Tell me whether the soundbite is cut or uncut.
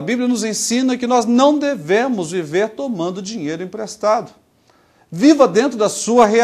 uncut